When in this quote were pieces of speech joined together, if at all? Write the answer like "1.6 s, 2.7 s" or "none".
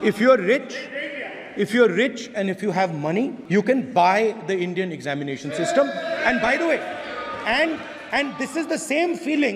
3.4 s